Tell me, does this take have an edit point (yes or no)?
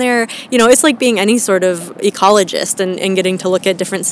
no